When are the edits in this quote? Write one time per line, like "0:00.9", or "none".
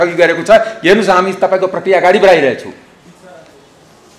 none

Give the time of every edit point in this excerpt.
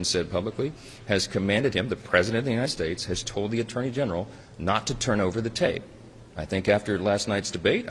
none

